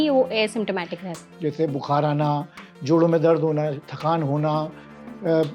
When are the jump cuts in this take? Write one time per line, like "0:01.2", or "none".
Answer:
0:01.2